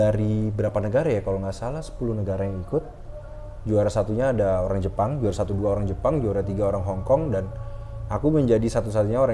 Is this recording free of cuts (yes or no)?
yes